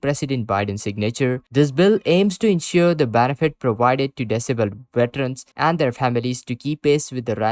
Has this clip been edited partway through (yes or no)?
no